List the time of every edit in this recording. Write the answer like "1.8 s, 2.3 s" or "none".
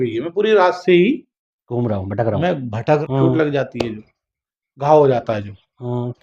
3.0 s